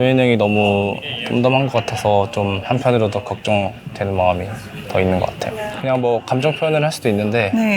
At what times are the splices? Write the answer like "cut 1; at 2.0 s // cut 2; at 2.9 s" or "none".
cut 1; at 5.7 s